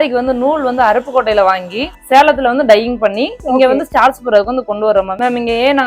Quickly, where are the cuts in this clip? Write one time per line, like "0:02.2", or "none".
0:01.9